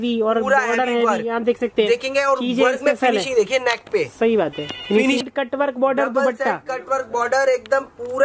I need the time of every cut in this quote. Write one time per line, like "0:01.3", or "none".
0:05.2